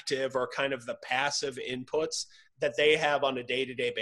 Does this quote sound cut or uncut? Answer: cut